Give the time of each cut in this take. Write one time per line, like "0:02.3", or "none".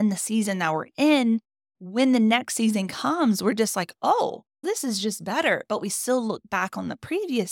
none